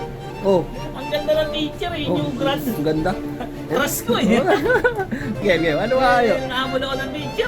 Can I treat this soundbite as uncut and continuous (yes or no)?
no